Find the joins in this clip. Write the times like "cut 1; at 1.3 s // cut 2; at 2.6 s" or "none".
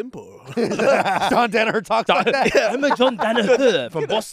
cut 1; at 1.3 s